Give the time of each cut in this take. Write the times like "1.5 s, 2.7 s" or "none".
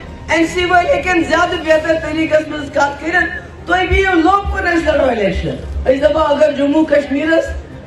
5.7 s

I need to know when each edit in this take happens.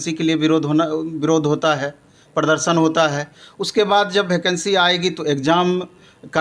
none

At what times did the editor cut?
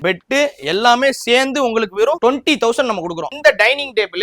3.3 s

